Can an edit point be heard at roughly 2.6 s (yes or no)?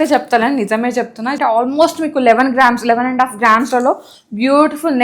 no